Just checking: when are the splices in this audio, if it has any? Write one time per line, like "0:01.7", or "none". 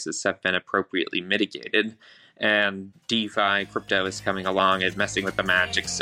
none